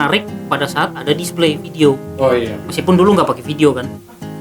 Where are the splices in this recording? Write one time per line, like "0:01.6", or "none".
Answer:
none